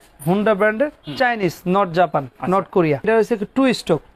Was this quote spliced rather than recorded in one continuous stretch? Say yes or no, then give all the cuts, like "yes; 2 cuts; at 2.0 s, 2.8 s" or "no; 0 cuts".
yes; 1 cut; at 3.1 s